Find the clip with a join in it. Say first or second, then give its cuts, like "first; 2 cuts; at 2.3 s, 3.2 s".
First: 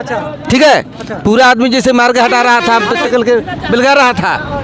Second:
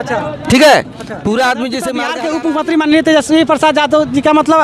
second; 1 cut; at 2.1 s